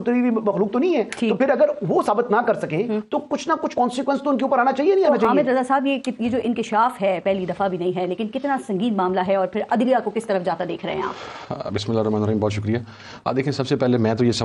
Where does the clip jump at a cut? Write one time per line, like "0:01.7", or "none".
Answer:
none